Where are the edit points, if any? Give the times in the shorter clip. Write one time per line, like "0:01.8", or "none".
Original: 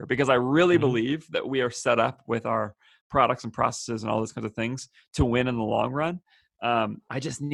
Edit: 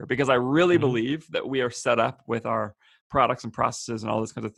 none